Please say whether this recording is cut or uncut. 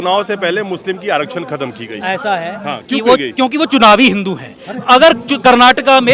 uncut